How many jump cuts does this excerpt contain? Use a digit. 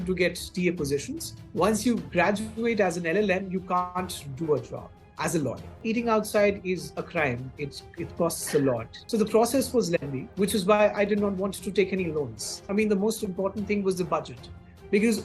5